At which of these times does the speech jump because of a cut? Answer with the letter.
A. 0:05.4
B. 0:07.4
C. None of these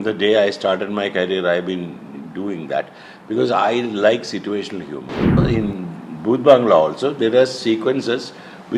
A